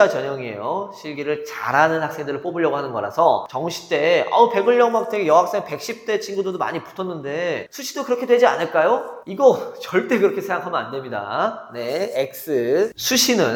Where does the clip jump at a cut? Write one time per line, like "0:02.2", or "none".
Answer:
none